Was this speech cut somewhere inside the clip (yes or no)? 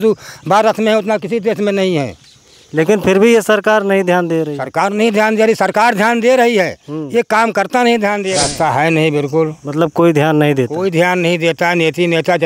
yes